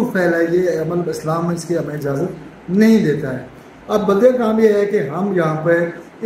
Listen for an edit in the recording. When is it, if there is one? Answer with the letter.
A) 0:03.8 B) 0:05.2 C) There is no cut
C